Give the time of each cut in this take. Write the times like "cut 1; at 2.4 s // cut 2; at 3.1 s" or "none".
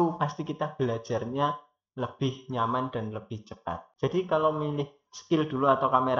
cut 1; at 3.9 s